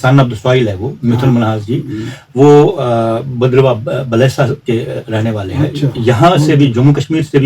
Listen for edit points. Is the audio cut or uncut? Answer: uncut